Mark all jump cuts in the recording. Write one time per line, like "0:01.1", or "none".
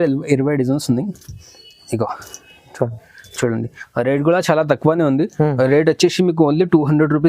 none